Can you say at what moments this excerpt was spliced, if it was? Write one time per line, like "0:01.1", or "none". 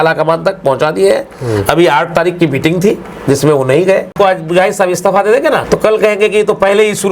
0:04.1
0:05.6